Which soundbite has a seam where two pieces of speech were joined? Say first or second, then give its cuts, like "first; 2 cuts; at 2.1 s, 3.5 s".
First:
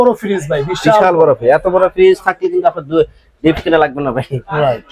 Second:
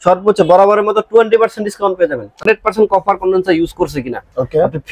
second; 1 cut; at 2.4 s